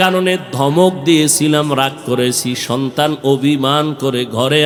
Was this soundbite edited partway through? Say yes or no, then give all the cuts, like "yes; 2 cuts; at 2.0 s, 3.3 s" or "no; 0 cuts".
no; 0 cuts